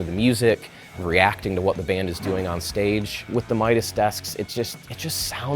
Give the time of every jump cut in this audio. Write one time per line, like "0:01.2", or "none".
0:03.2

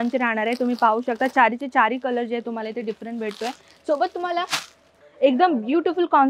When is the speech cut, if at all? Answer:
0:05.0

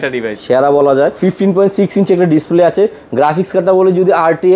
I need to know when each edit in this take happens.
0:01.1

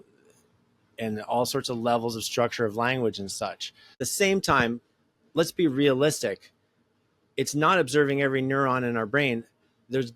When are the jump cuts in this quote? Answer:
0:04.0

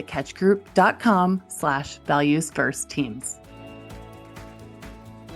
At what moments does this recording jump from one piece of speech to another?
0:03.2

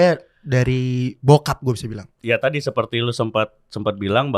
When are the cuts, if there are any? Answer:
0:02.1

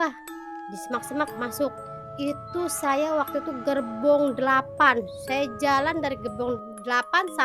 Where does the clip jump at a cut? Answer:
none

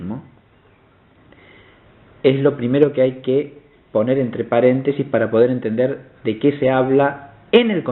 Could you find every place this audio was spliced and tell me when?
none

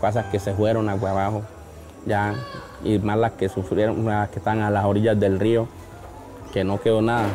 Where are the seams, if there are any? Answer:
none

